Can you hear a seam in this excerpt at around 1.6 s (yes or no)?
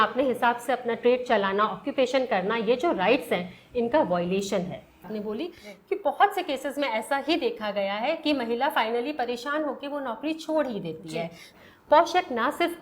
no